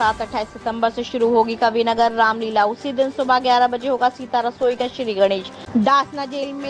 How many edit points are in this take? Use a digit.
1